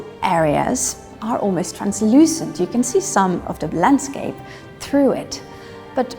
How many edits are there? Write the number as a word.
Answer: two